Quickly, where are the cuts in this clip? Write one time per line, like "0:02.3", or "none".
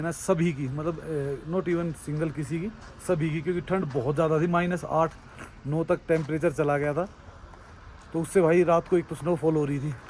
none